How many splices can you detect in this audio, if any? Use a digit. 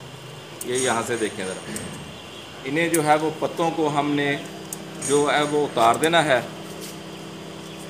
0